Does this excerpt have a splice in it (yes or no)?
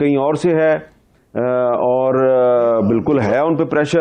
no